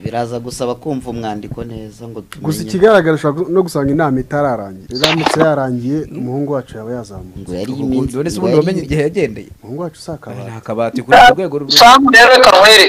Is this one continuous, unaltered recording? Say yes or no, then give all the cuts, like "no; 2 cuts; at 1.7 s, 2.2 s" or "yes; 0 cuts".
no; 2 cuts; at 4.8 s, 9.5 s